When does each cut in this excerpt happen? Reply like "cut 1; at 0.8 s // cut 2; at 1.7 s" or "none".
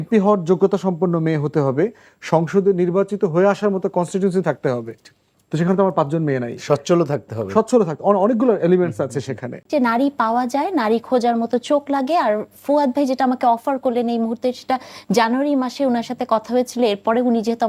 cut 1; at 9.6 s

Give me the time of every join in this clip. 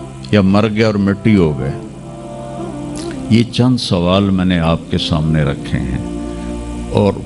none

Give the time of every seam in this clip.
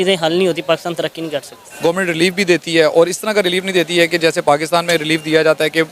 cut 1; at 1.6 s

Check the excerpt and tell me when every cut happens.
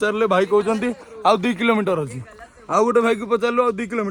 none

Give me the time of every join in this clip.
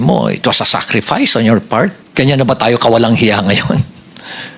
cut 1; at 2.0 s

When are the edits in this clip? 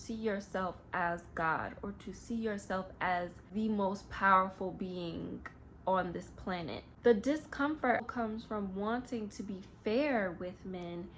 cut 1; at 3.4 s // cut 2; at 6.8 s // cut 3; at 8.1 s

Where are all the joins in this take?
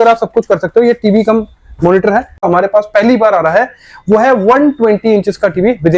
cut 1; at 2.4 s

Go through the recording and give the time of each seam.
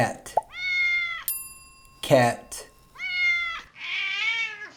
none

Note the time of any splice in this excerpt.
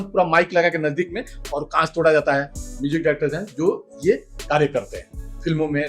cut 1; at 2.7 s

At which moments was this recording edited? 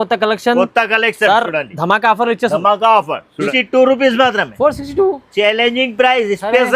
cut 1; at 3.5 s

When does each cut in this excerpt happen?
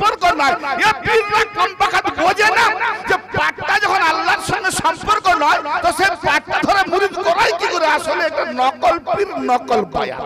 none

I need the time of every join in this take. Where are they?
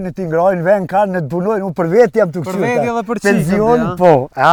none

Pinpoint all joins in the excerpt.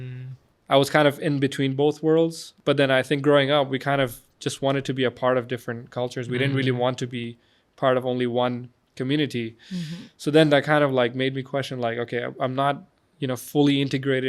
cut 1; at 2.5 s

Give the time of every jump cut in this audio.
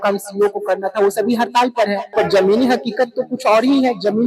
cut 1; at 2.1 s

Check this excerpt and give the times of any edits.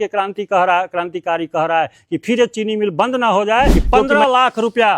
cut 1; at 3.9 s

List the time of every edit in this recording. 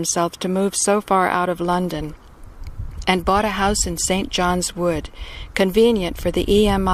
none

